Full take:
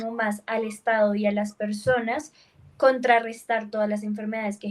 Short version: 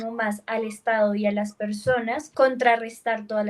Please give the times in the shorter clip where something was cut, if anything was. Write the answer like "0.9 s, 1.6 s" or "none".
2.2 s